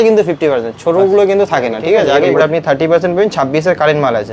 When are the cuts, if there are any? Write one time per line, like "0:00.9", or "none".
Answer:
0:02.3